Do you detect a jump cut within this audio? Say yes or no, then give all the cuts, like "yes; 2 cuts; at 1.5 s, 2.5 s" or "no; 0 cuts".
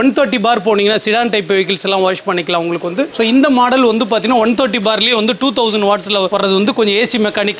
no; 0 cuts